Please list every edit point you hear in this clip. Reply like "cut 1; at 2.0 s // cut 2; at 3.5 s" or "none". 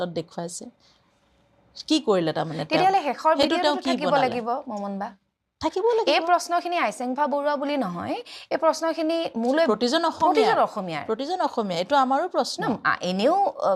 none